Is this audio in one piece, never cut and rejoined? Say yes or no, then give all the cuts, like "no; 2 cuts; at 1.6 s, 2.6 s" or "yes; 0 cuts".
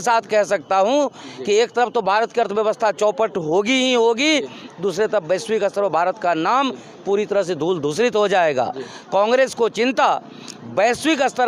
yes; 0 cuts